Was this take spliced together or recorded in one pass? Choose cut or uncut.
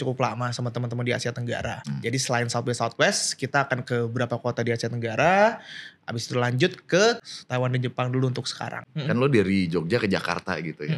cut